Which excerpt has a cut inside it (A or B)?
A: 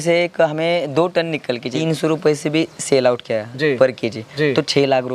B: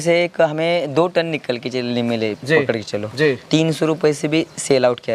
A